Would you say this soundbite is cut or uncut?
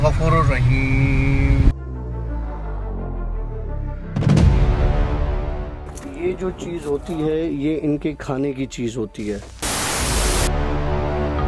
uncut